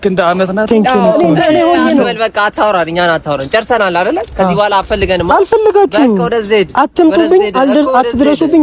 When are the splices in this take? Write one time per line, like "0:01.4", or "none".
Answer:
0:01.1